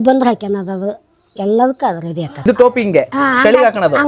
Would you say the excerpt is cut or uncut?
cut